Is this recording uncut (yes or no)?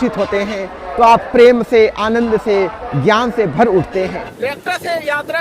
no